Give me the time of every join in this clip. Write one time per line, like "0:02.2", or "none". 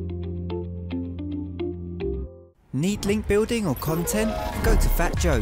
0:02.2